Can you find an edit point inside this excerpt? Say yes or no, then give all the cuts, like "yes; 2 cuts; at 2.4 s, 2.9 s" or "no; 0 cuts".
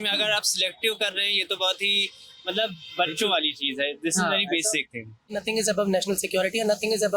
yes; 1 cut; at 5.4 s